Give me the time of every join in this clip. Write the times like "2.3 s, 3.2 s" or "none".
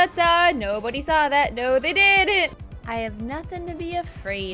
2.5 s

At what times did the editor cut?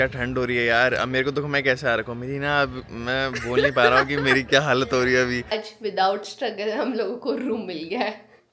5.6 s

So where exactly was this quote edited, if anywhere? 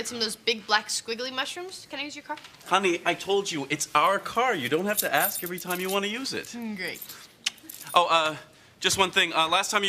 5.6 s

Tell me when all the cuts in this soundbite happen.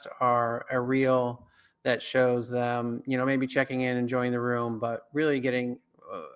none

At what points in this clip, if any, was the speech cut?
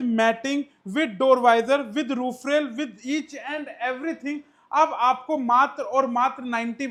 none

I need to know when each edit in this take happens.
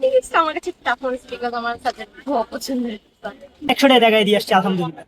3.5 s

